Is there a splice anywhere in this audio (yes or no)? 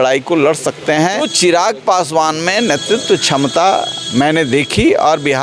yes